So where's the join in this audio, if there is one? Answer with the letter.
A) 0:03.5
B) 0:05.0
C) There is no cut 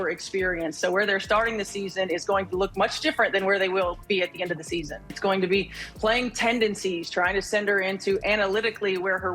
B